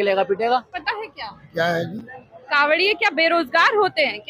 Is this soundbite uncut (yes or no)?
no